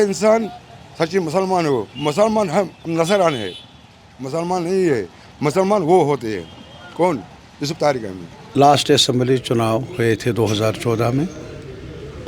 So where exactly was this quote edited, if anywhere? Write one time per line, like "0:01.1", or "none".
0:08.3